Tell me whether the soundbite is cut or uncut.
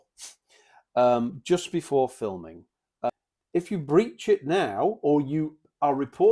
cut